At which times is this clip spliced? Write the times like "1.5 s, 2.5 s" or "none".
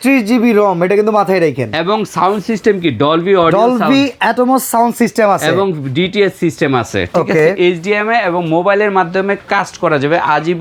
none